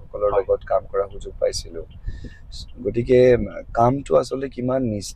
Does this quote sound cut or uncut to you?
uncut